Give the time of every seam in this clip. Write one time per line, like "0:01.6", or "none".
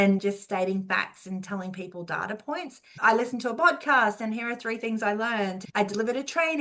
0:02.8
0:05.6